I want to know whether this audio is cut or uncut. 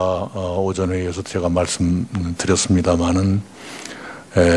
uncut